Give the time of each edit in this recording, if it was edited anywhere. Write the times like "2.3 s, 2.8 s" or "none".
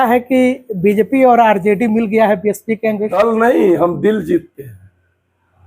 3.1 s